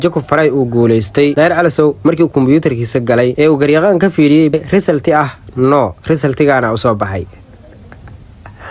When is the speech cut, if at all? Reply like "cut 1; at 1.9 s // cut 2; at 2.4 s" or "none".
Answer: cut 1; at 4.5 s